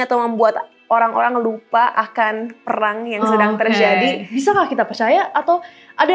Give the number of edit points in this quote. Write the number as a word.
one